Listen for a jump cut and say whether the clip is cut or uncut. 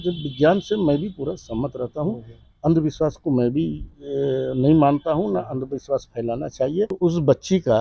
cut